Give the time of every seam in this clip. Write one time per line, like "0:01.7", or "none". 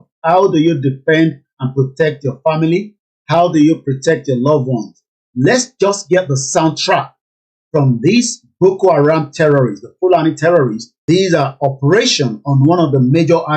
0:11.1